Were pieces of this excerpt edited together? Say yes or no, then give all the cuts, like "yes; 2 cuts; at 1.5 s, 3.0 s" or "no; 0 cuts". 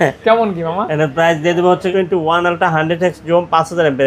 yes; 1 cut; at 1.9 s